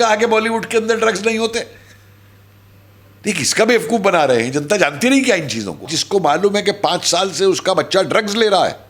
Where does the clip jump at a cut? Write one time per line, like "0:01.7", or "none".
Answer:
0:05.8